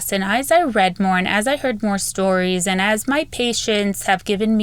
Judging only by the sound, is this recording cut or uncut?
uncut